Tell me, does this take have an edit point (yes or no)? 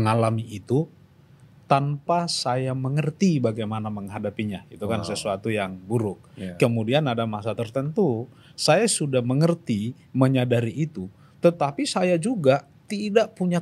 no